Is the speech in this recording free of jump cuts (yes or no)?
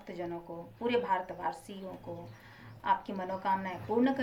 yes